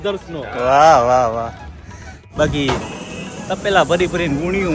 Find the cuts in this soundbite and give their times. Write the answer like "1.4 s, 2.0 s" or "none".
2.2 s